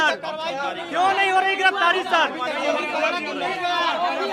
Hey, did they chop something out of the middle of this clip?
no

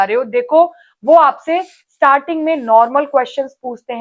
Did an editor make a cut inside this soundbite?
no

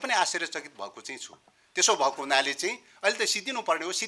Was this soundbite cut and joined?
no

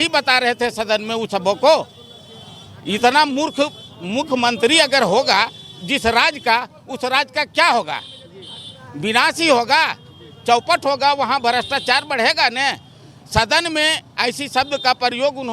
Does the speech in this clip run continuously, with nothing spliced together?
yes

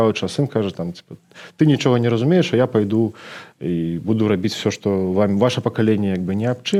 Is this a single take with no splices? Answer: yes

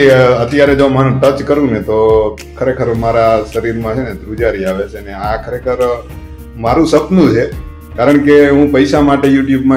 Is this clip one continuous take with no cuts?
yes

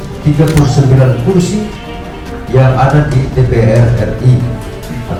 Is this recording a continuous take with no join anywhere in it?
yes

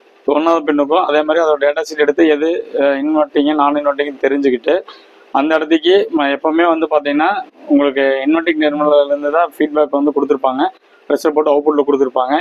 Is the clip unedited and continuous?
yes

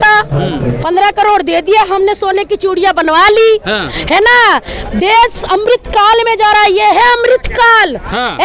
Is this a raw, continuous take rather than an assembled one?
no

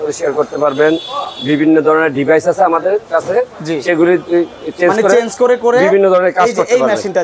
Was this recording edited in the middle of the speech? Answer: no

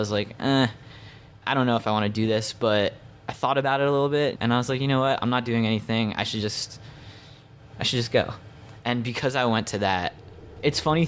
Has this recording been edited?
yes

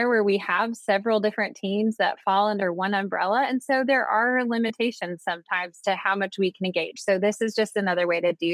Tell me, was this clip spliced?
no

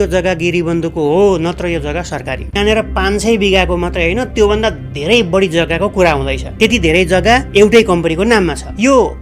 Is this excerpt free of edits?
no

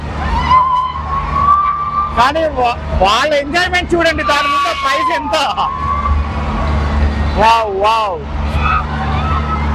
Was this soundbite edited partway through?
no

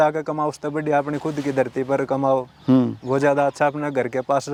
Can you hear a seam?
no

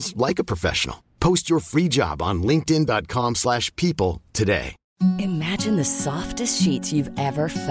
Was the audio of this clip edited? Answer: yes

